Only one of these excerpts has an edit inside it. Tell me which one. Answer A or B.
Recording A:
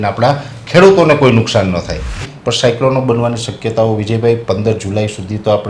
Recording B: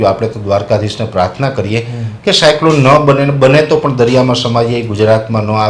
A